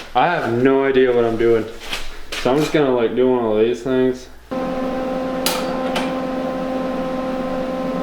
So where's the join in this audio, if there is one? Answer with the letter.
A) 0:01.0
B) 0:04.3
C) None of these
B